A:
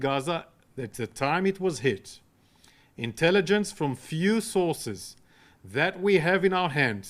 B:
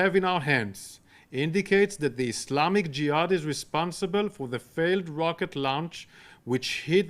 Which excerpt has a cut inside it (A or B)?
B